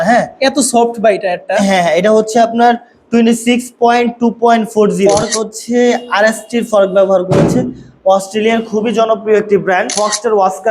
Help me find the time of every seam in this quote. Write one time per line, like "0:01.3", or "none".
0:05.1
0:09.9